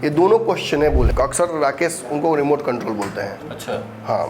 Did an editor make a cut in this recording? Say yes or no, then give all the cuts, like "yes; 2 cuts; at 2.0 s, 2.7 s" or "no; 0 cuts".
yes; 1 cut; at 1.1 s